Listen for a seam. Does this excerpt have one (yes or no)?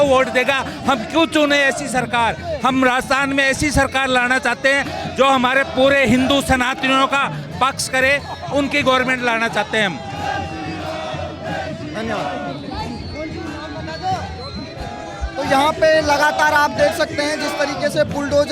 no